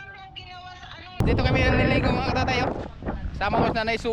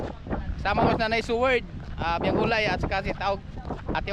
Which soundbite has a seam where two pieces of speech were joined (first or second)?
first